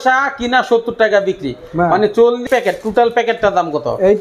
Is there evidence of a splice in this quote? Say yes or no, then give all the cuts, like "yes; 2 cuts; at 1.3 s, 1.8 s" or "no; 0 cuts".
yes; 1 cut; at 2.4 s